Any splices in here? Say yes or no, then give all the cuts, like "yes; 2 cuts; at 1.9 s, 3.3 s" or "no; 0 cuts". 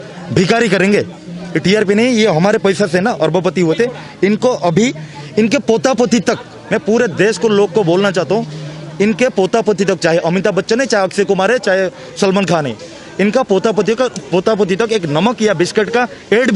no; 0 cuts